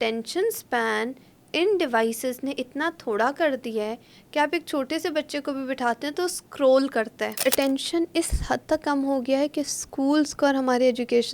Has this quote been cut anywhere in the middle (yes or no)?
yes